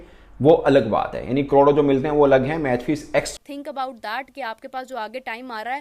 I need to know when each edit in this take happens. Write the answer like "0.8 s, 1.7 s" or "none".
3.3 s